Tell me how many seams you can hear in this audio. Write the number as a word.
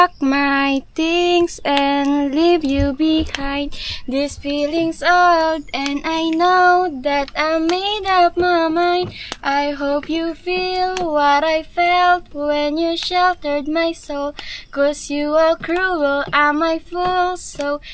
zero